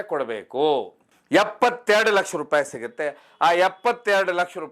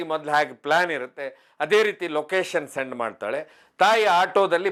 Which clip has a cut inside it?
first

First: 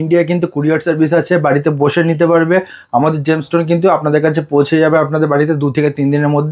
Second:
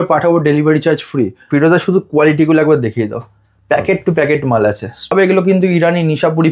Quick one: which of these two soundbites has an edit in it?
second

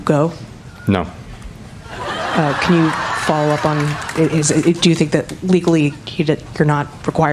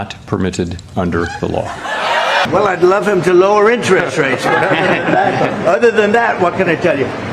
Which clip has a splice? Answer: second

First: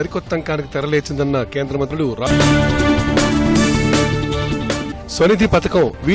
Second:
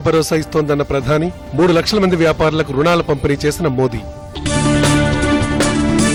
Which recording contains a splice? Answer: first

